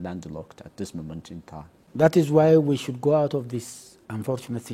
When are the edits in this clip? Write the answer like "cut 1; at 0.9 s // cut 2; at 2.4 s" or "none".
cut 1; at 1.8 s